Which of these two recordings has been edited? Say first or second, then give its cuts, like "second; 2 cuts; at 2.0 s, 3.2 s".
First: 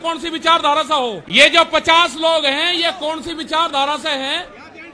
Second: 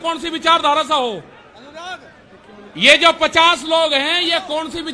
first; 1 cut; at 1.2 s